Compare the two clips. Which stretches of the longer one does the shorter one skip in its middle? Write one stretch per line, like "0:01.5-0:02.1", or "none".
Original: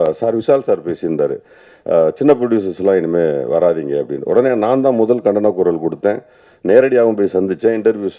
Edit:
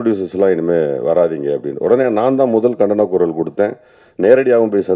none